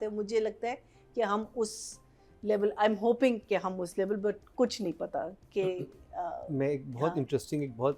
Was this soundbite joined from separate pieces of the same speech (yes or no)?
no